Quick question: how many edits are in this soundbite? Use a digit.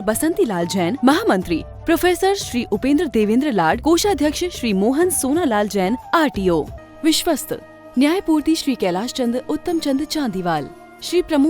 1